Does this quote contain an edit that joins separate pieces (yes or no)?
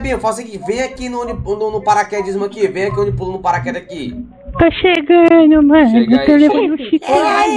no